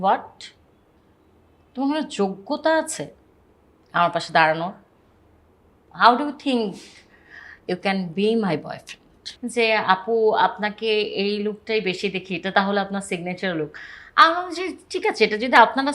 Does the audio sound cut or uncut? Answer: cut